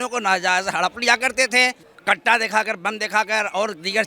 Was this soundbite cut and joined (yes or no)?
yes